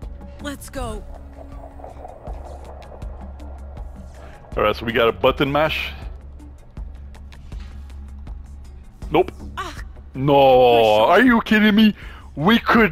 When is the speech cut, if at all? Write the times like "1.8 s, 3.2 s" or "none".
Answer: none